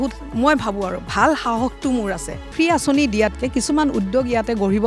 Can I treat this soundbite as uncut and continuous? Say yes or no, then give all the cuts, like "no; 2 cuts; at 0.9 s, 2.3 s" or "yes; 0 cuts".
no; 1 cut; at 2.5 s